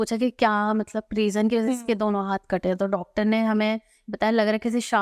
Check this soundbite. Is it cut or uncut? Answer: uncut